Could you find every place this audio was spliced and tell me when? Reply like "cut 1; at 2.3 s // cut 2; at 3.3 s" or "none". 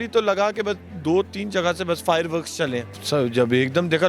cut 1; at 3.0 s